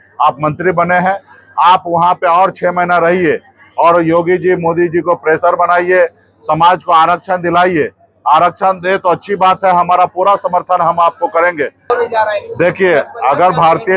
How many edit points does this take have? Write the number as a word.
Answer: one